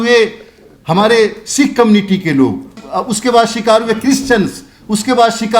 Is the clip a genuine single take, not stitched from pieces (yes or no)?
no